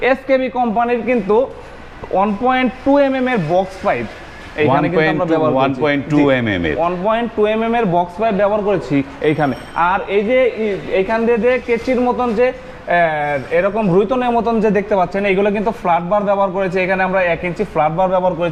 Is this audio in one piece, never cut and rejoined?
yes; 0 cuts

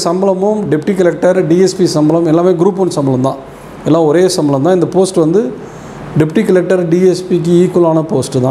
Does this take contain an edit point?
no; 0 cuts

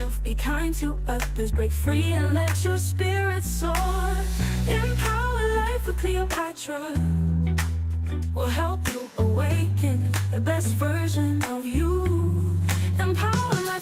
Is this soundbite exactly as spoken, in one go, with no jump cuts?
yes; 0 cuts

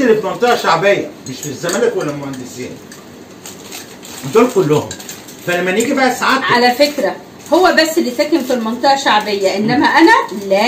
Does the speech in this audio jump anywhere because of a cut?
no; 0 cuts

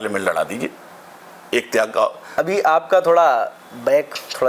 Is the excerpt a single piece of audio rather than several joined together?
no; 1 cut; at 2.2 s

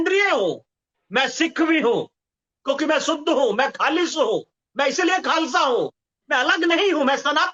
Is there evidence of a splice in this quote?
no; 0 cuts

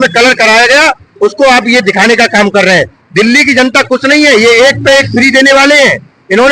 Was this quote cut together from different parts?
no; 0 cuts

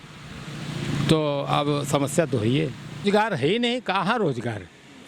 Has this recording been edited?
yes; 1 cut; at 3.0 s

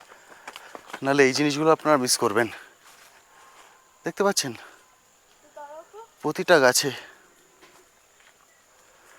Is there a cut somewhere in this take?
no; 0 cuts

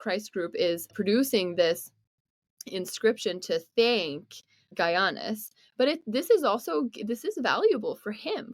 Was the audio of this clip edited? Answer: yes; 2 cuts; at 0.9 s, 4.6 s

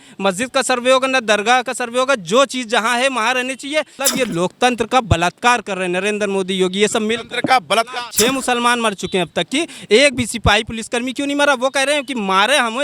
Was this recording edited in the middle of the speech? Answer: yes; 2 cuts; at 4.0 s, 8.0 s

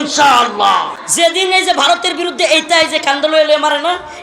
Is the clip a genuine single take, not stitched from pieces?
no; 1 cut; at 1.0 s

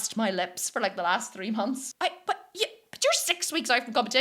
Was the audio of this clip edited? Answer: yes; 1 cut; at 1.9 s

